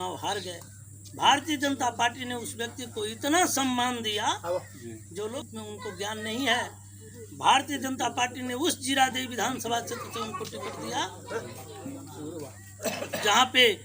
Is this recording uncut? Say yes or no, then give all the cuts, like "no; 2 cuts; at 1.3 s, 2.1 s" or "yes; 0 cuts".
no; 1 cut; at 5.3 s